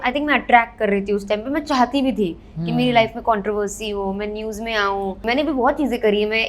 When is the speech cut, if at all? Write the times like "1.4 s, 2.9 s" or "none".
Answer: 5.2 s